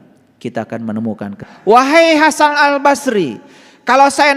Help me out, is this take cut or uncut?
cut